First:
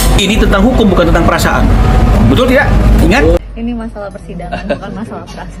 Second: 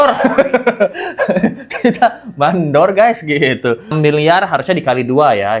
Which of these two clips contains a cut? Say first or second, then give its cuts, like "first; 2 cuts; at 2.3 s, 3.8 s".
second; 1 cut; at 3.9 s